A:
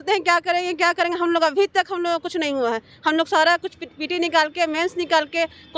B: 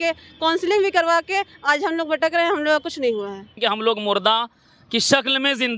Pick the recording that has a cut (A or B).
B